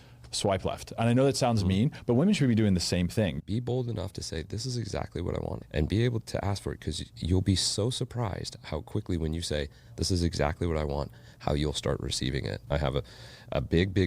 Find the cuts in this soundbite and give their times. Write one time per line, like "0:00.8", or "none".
0:03.4
0:05.6
0:06.2
0:12.6